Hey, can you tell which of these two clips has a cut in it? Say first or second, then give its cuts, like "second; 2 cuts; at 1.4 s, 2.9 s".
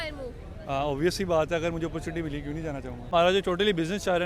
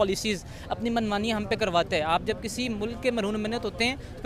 first; 1 cut; at 3.1 s